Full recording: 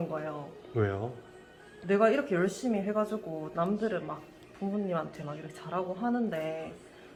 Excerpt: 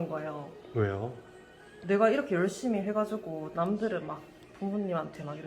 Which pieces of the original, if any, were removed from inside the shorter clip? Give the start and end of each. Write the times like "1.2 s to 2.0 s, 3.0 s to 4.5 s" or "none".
none

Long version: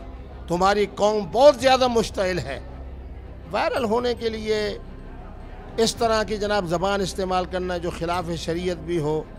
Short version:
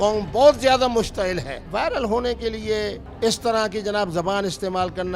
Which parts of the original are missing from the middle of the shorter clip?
2.6 s to 3.4 s, 4.8 s to 5.6 s

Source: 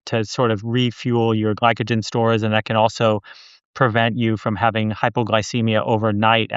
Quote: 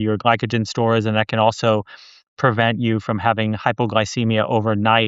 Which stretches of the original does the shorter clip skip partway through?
none

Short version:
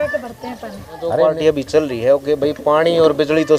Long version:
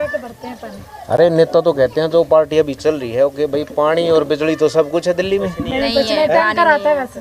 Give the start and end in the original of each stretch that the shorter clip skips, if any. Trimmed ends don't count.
1.1 s to 2.2 s

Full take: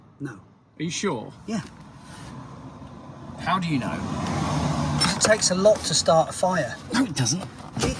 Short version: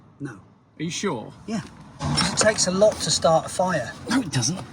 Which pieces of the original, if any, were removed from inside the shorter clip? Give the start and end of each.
2.0 s to 4.9 s

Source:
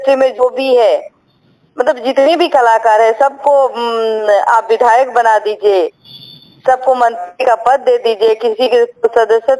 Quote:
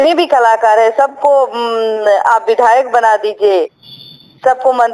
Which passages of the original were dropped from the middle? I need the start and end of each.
none

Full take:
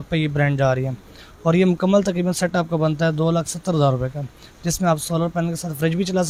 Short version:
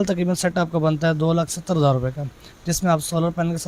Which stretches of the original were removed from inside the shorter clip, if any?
none

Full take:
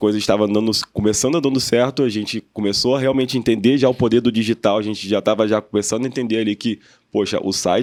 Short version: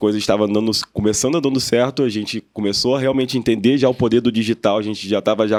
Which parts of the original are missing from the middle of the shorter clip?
none

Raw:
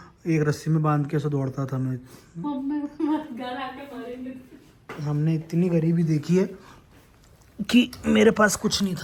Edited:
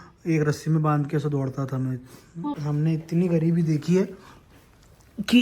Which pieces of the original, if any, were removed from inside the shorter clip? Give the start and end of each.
2.5 s to 4.9 s

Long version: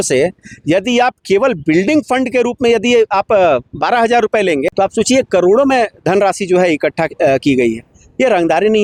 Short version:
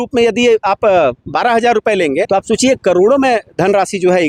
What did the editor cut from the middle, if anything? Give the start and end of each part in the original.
none

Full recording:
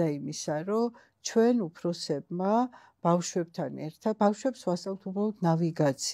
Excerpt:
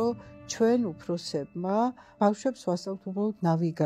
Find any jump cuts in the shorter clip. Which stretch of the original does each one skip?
2.9 s to 4.2 s

